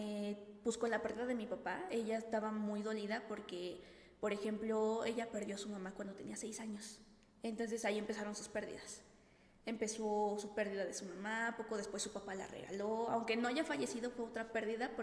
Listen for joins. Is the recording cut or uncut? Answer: uncut